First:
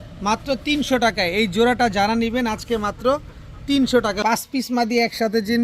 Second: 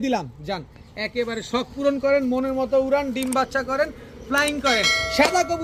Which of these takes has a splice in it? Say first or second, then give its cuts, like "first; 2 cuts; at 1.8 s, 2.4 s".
first; 1 cut; at 4.2 s